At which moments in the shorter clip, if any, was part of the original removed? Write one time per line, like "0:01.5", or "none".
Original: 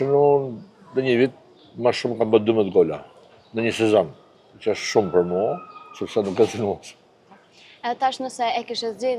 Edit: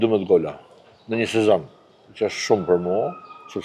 none